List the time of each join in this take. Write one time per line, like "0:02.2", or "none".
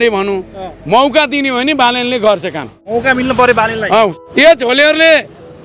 0:02.8
0:04.1